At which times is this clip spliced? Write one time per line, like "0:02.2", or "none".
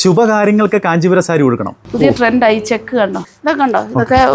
0:01.7